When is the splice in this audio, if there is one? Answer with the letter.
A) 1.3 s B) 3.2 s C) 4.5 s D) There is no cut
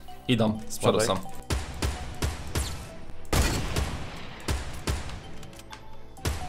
A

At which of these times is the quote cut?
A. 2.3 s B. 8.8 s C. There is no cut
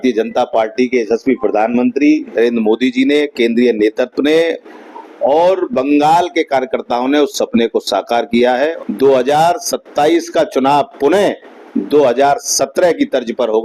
B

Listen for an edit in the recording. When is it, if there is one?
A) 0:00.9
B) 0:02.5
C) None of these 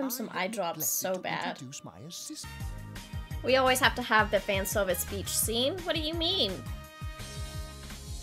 B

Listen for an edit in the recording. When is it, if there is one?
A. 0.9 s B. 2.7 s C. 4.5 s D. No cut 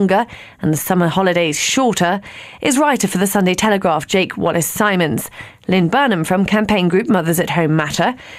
D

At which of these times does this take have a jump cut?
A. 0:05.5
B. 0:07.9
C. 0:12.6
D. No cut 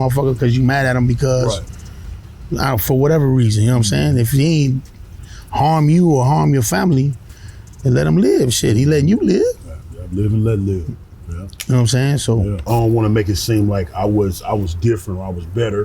C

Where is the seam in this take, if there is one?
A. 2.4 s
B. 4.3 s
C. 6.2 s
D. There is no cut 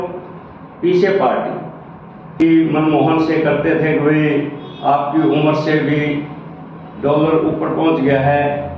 A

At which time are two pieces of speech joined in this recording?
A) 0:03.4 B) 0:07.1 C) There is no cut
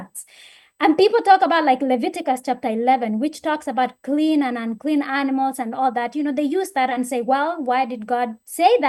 C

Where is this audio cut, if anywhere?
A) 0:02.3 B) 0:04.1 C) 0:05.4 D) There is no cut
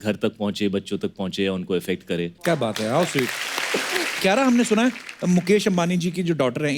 B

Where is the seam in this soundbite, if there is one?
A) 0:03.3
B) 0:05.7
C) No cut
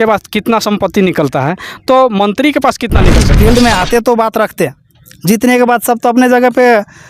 A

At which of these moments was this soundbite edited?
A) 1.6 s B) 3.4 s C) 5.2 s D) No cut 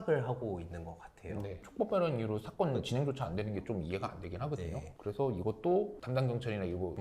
A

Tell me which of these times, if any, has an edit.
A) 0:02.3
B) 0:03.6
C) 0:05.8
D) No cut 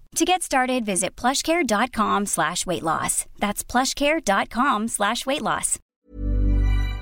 C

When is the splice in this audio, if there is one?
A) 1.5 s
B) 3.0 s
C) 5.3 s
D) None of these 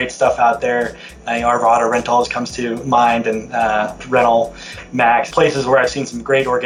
C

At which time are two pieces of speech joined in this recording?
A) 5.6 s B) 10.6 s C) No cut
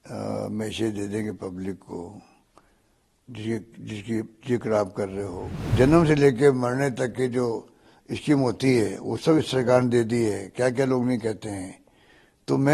A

